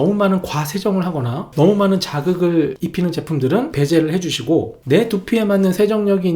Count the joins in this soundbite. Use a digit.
3